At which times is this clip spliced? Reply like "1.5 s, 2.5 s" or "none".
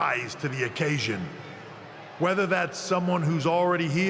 3.0 s

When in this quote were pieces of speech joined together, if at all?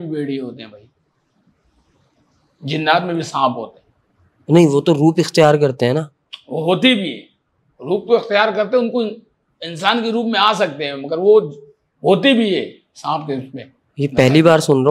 none

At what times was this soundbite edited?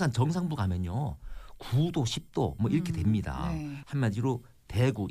3.8 s

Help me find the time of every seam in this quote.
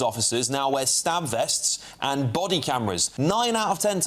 3.1 s

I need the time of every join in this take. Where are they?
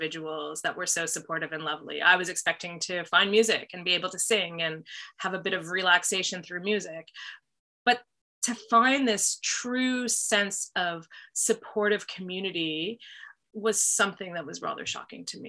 none

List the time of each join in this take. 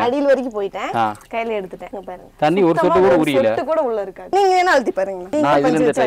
none

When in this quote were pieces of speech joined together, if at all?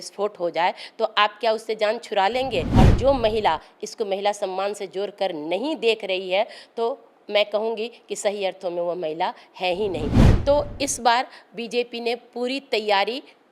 2.7 s, 10.2 s

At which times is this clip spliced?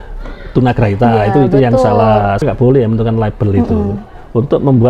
2.4 s

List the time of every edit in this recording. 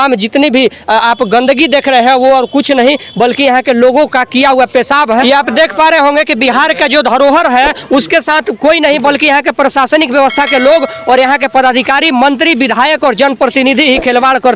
5.0 s

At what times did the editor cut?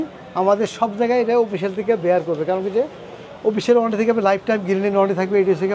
none

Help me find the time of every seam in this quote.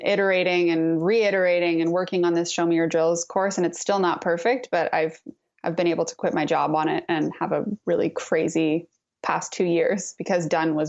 none

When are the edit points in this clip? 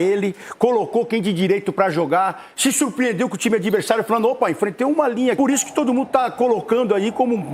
5.4 s

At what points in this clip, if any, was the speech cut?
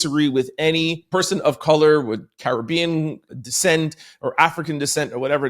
1.0 s, 3.2 s

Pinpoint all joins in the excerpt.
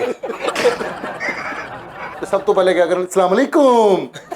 2.2 s

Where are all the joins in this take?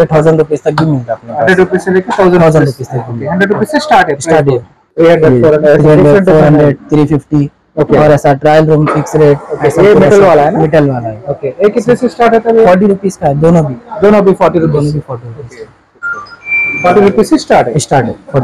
none

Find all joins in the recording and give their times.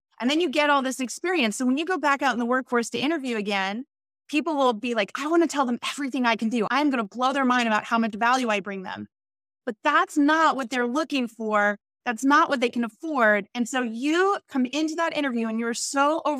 6.7 s

